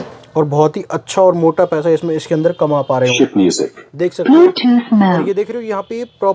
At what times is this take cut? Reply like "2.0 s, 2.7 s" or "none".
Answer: 3.1 s